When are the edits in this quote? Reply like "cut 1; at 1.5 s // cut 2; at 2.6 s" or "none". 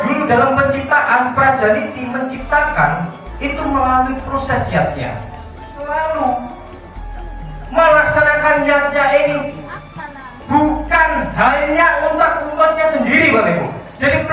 cut 1; at 5.7 s